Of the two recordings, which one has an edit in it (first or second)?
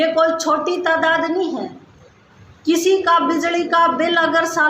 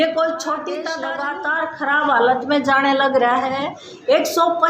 second